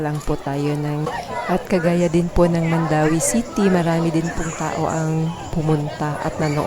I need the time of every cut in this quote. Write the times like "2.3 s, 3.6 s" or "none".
1.1 s